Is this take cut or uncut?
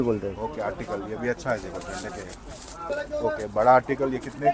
cut